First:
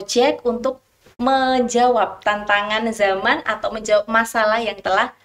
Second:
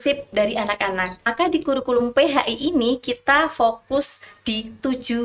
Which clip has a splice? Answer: second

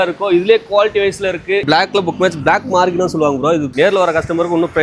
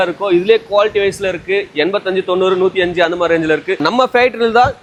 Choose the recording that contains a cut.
first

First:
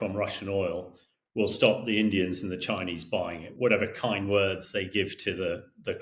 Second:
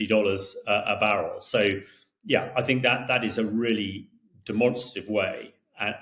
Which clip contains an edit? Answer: first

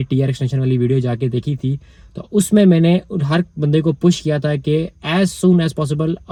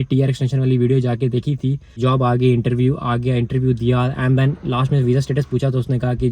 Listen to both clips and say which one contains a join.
second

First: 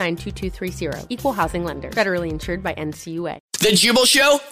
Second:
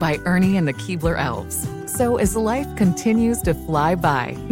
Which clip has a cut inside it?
first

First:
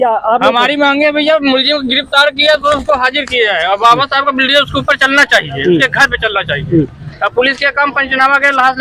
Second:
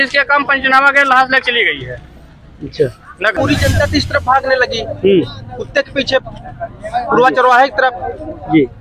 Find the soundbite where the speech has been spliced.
second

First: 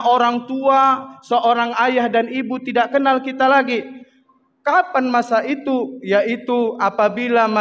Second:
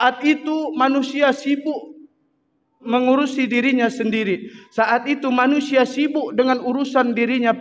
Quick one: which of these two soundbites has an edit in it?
second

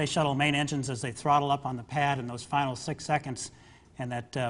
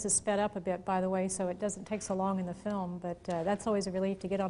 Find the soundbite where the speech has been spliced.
first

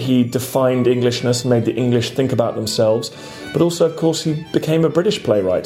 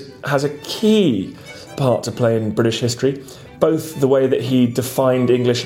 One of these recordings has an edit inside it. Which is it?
second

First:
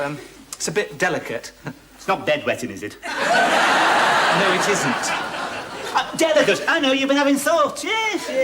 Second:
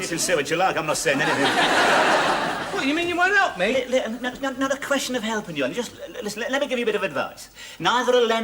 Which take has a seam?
first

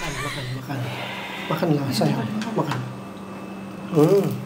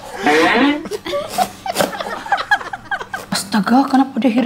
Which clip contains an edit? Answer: second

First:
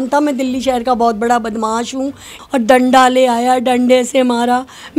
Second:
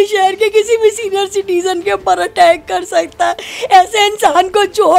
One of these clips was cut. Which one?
first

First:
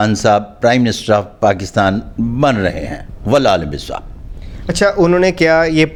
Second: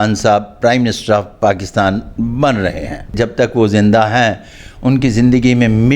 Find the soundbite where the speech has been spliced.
second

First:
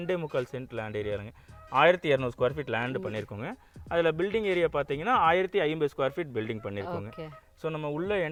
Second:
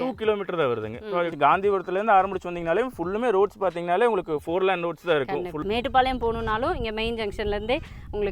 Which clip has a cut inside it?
second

